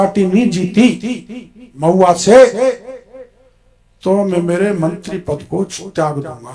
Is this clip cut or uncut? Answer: uncut